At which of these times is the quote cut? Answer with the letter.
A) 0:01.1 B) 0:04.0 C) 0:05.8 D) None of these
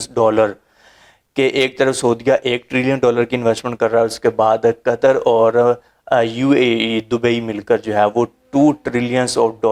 D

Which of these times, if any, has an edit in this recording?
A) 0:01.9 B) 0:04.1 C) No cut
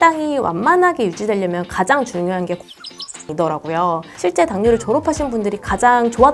B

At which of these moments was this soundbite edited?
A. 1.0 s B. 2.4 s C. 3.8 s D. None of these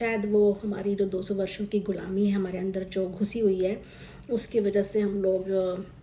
D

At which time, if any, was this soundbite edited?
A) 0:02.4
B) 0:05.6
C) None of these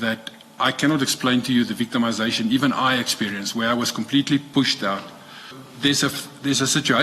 B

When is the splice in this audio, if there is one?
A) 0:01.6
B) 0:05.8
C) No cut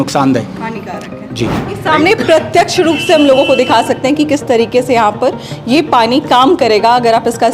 A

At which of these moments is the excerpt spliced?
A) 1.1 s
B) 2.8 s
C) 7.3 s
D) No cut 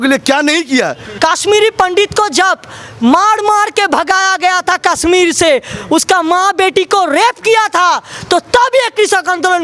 A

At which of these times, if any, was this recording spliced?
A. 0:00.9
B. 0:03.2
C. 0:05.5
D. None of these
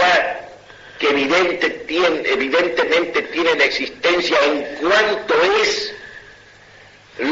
C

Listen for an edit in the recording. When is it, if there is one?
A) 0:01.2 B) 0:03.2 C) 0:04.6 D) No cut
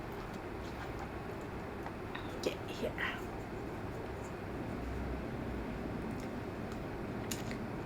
C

